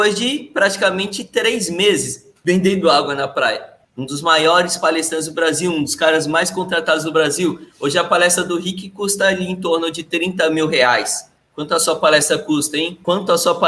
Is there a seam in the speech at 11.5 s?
no; 1 cut; at 3.9 s

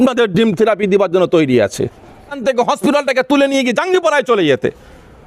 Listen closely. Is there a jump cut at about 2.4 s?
yes; 1 cut; at 2.4 s

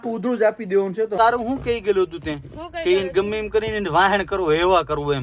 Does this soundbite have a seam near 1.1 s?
yes; 1 cut; at 1.1 s

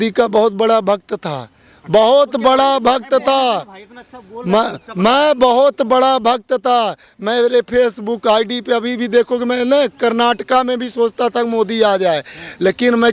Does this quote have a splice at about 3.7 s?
no; 0 cuts

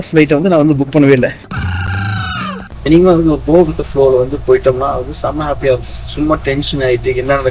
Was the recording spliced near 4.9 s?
no; 1 cut; at 2.6 s

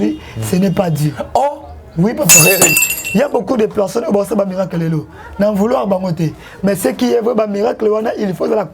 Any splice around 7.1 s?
no; 1 cut; at 2.7 s

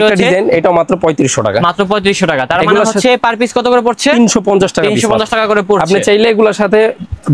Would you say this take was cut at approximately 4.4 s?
no; 0 cuts

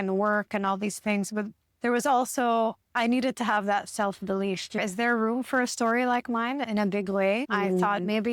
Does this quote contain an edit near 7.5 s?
yes; 3 cuts; at 4.8 s, 6.6 s, 7.5 s

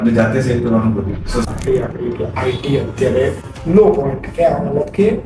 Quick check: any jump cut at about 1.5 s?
yes; 1 cut; at 1.5 s

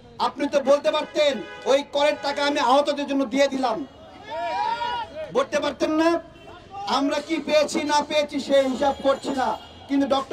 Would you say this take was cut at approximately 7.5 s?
no; 0 cuts

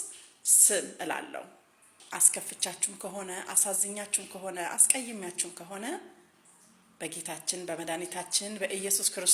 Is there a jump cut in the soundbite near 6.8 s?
no; 1 cut; at 2.0 s

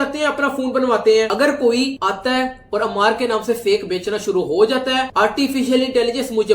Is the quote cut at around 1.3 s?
yes; 1 cut; at 1.3 s

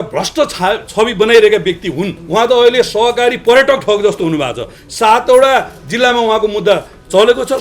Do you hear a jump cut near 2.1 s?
yes; 1 cut; at 2.1 s

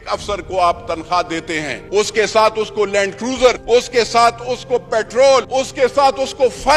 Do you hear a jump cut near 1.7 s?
yes; 3 cuts; at 1.7 s, 3.6 s, 5.5 s

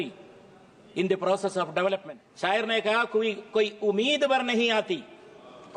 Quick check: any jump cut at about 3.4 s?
no; 1 cut; at 2.2 s

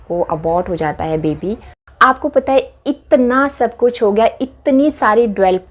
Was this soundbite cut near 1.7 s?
yes; 1 cut; at 1.7 s

